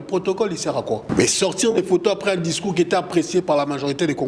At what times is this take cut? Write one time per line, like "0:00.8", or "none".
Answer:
0:01.1

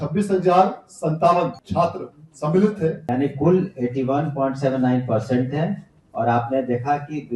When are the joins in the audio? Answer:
0:01.6
0:03.0

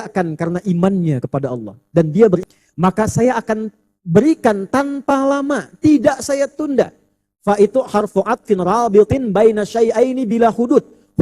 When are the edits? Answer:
0:02.4

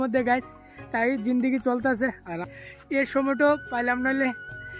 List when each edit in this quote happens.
0:02.5

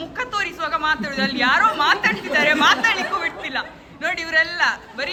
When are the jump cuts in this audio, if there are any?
none

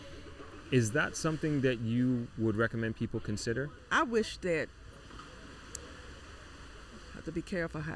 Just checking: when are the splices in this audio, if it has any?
0:03.8

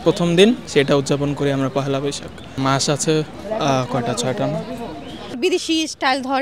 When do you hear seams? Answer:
0:02.6
0:05.4

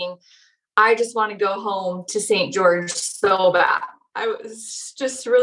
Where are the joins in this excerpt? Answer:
0:04.0

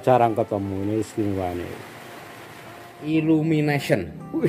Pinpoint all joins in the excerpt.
0:03.1

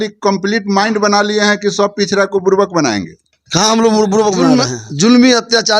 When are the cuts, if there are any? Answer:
0:04.4

